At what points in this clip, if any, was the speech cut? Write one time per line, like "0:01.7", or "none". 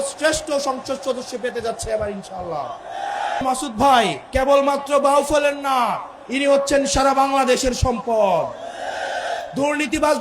0:03.4
0:04.2
0:09.4